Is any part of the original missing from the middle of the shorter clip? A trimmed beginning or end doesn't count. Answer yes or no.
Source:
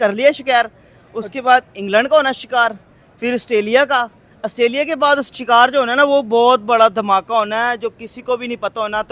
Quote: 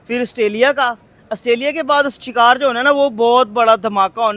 no